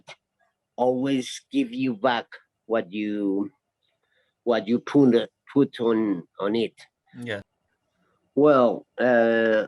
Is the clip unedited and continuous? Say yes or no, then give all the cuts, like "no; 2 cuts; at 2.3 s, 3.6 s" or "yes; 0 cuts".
no; 1 cut; at 7.5 s